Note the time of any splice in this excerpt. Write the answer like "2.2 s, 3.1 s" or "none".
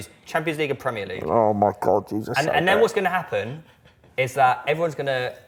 none